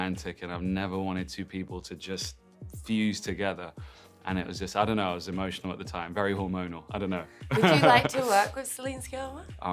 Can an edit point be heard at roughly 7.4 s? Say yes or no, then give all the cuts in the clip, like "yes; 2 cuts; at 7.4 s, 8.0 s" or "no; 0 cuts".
no; 0 cuts